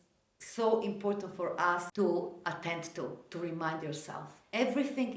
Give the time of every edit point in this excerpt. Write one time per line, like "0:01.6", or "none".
0:01.9